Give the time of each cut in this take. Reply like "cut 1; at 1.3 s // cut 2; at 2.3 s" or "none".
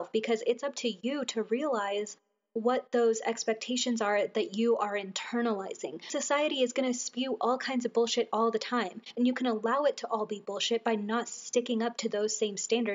cut 1; at 6.1 s // cut 2; at 9.0 s